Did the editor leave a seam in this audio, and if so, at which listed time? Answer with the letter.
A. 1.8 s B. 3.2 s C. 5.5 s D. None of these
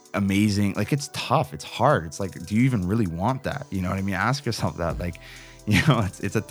D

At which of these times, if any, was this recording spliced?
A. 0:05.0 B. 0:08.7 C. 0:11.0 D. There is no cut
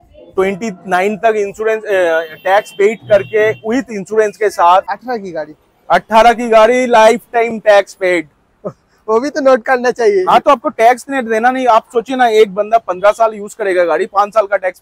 A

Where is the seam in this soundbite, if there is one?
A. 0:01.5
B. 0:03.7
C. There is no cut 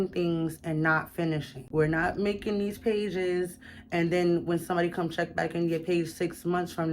A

